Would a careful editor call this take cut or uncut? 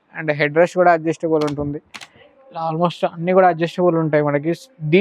uncut